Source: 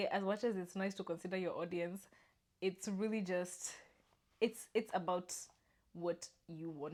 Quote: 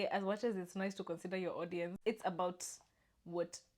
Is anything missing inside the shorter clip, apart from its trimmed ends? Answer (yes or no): yes